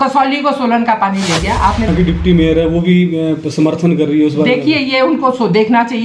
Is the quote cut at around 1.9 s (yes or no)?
yes